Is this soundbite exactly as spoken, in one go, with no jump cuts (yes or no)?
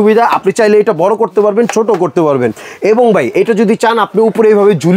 yes